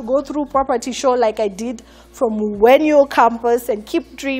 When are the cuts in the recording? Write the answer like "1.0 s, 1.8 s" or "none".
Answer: none